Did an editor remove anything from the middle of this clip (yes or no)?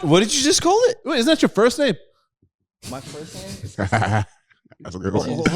yes